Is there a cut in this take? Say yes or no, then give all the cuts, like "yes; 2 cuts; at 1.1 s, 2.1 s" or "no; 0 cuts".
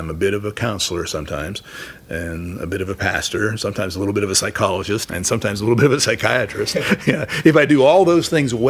no; 0 cuts